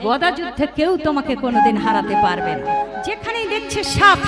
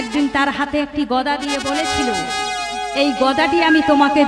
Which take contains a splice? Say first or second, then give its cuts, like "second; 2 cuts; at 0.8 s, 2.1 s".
first; 1 cut; at 3.1 s